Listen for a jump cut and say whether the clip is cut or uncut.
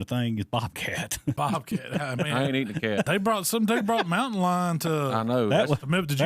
cut